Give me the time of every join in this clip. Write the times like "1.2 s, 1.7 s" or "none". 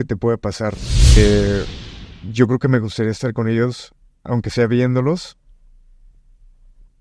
1.2 s

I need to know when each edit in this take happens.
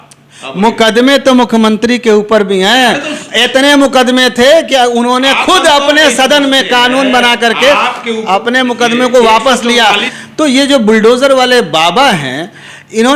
10.1 s

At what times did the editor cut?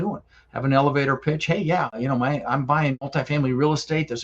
2.0 s, 3.0 s

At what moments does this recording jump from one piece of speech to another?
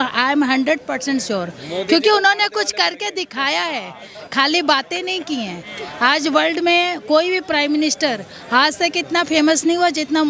none

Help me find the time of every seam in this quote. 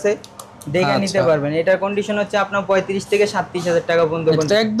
none

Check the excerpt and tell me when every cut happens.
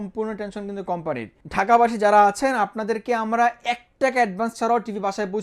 1.3 s

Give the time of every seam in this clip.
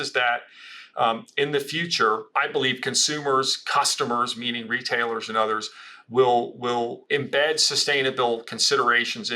2.3 s, 7.0 s

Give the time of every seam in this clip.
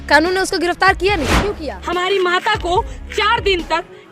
1.7 s

